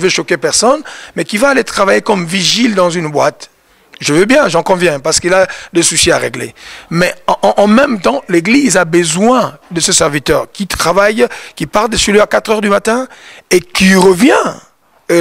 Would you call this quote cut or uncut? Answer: uncut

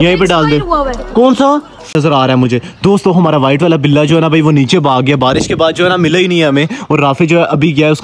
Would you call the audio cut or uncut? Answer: cut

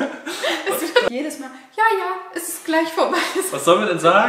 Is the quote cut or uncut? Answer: cut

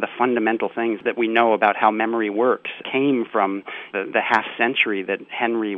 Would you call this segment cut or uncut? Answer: cut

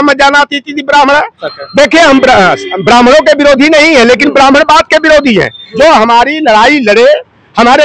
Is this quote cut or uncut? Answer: cut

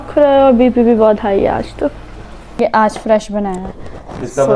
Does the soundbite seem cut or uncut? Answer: cut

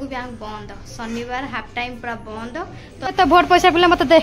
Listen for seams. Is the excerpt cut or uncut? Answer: cut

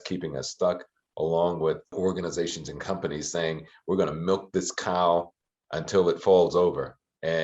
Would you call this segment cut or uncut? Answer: cut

